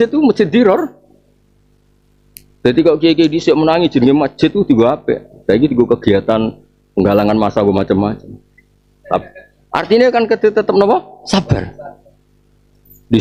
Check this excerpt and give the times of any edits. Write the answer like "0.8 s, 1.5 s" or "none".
none